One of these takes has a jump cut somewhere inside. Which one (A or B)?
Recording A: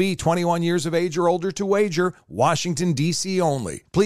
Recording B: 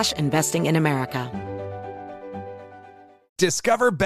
B